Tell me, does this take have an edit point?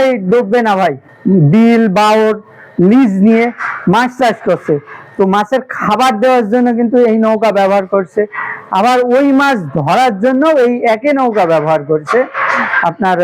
yes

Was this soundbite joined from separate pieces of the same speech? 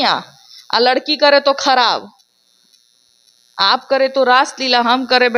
no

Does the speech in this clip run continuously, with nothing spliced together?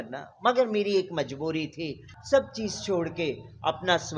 no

